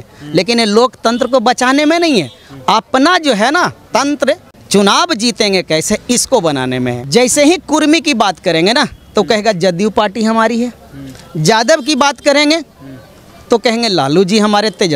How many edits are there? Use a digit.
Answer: 2